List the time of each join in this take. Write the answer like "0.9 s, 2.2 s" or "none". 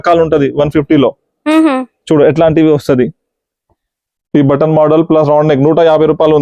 none